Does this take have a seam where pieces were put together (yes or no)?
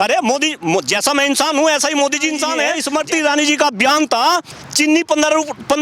yes